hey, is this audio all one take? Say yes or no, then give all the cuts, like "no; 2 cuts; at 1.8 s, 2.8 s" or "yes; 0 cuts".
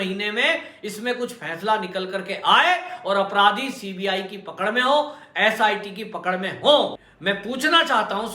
no; 1 cut; at 7.0 s